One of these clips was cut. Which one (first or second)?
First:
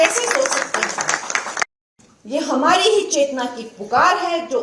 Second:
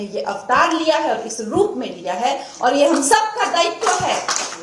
first